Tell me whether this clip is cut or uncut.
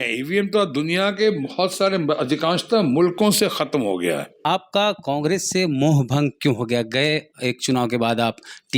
cut